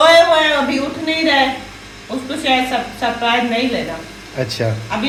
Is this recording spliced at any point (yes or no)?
no